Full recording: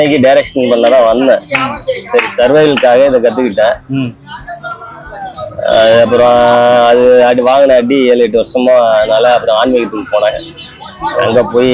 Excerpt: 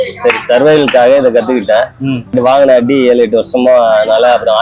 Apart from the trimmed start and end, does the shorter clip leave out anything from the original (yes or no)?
yes